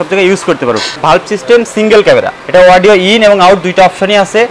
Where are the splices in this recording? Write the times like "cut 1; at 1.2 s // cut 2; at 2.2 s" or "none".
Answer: cut 1; at 0.9 s // cut 2; at 2.4 s